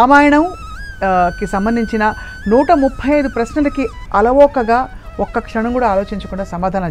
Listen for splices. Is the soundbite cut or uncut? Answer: uncut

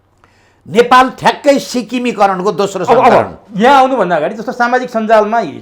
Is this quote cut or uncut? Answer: uncut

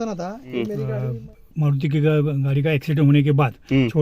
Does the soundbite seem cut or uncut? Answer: cut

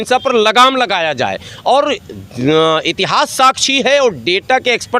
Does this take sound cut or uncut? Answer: uncut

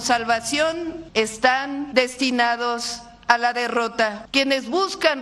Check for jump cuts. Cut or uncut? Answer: cut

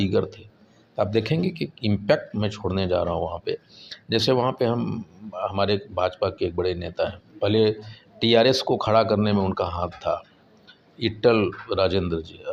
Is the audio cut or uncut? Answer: uncut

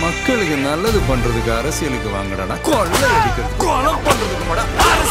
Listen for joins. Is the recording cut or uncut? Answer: uncut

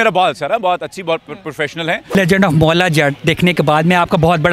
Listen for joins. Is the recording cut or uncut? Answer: cut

